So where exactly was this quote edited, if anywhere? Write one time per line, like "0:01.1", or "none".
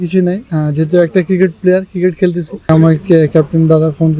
0:02.7